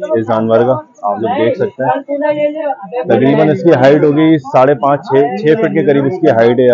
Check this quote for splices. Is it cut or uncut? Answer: uncut